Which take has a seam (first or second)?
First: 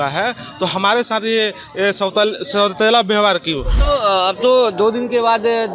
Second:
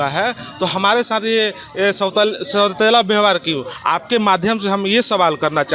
first